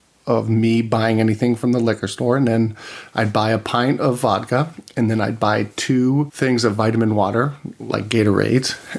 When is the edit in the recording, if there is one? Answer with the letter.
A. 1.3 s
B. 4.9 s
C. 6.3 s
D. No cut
C